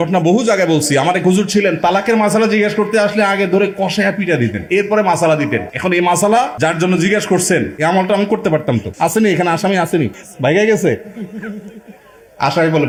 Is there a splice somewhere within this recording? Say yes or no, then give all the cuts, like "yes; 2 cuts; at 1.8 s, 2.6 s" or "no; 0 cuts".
no; 0 cuts